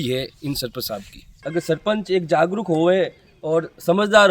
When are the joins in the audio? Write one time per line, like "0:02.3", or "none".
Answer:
0:01.3